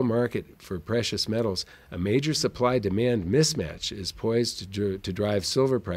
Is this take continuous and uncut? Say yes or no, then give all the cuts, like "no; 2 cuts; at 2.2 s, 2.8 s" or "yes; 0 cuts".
yes; 0 cuts